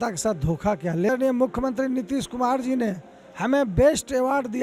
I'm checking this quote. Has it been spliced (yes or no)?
yes